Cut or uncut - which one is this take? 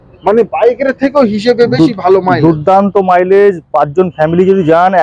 uncut